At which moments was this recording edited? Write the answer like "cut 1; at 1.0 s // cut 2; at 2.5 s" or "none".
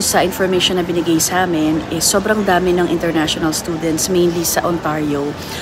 none